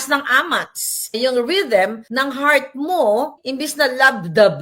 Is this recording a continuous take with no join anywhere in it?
no; 3 cuts; at 1.1 s, 2.0 s, 3.4 s

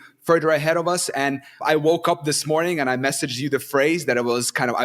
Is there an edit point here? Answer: yes; 1 cut; at 1.6 s

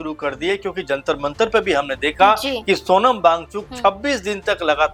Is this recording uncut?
yes; 0 cuts

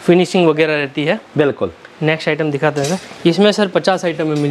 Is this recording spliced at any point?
no; 0 cuts

